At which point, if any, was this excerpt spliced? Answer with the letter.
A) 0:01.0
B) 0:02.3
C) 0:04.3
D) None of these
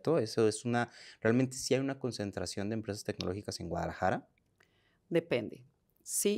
D